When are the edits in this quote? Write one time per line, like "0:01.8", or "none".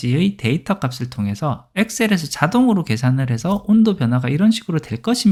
none